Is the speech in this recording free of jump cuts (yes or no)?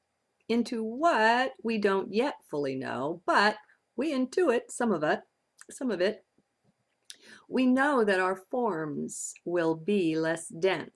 yes